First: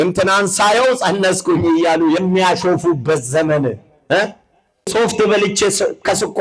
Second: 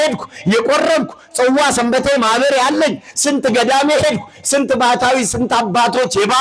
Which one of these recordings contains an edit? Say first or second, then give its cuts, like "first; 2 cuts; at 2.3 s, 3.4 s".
first; 1 cut; at 4.9 s